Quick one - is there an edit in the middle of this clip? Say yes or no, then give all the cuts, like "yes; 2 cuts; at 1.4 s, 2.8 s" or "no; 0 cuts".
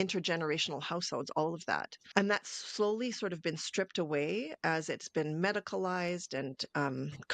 no; 0 cuts